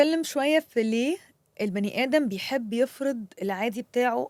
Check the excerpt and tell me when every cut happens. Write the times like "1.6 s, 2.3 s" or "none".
none